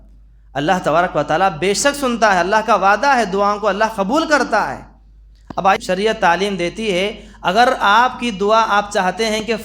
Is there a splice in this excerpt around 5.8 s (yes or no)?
yes